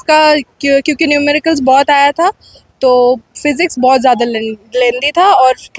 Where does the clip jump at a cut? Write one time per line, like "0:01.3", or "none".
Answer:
none